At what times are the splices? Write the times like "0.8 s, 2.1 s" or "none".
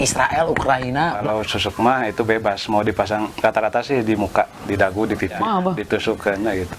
1.2 s, 5.4 s

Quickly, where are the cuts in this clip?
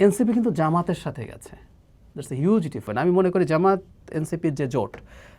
2.9 s

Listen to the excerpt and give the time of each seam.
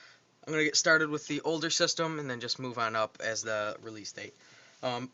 1.7 s

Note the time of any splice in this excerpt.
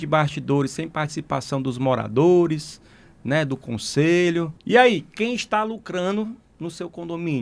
4.6 s

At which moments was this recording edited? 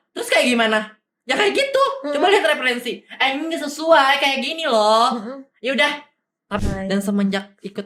6.6 s

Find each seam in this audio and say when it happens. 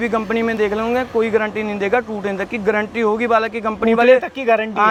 none

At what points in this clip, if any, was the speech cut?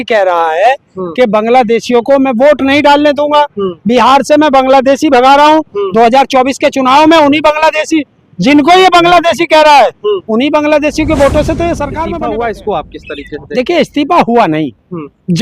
12.0 s

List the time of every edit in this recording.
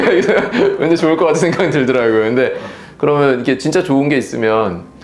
none

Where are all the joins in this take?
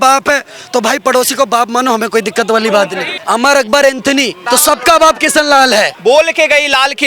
3.1 s, 4.4 s, 5.9 s

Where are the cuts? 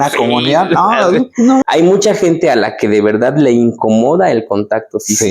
1.6 s

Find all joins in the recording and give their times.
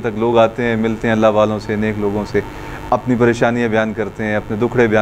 none

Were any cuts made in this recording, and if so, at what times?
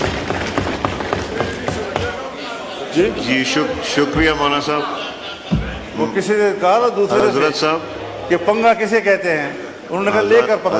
none

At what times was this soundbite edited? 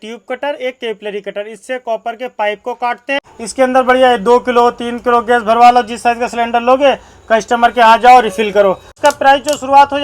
3.3 s, 9.0 s

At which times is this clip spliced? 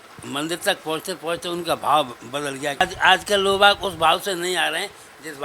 2.8 s

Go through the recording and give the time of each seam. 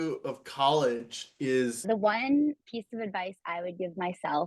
1.8 s

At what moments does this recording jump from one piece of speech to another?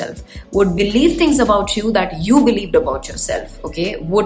none

